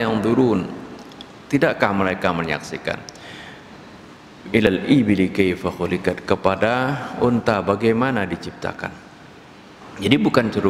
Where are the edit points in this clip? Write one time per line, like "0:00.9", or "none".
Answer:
0:04.7